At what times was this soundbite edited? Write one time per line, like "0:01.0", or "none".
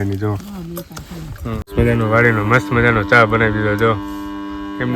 0:01.7

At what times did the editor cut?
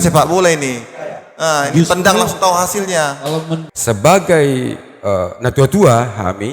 0:03.6

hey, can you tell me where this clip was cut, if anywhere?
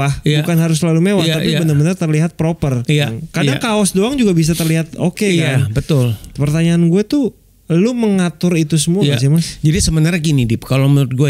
0:03.1

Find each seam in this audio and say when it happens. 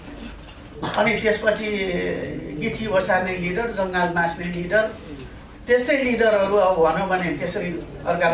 none

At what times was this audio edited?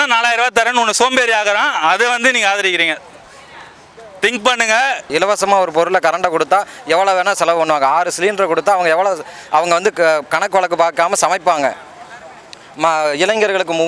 0:05.1

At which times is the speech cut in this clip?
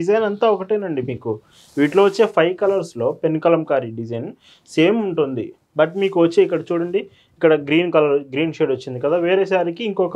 none

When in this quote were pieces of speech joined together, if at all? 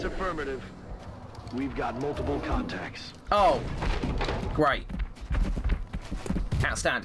none

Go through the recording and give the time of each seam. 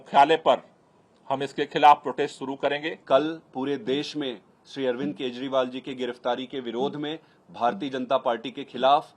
none

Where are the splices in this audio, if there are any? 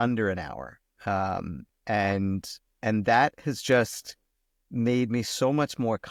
none

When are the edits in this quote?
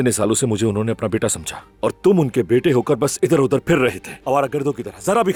none

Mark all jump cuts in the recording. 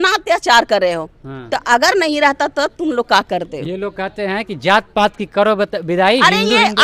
none

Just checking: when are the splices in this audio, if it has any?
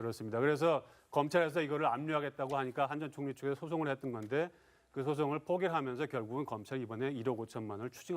0:04.2

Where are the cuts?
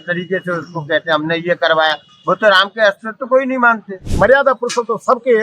0:04.1

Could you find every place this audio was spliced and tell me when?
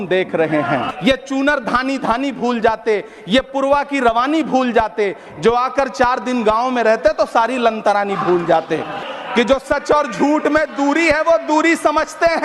0:00.9
0:09.0

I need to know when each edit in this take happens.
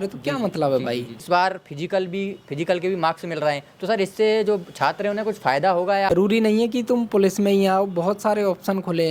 0:01.1
0:06.1

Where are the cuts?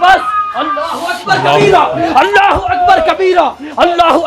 none

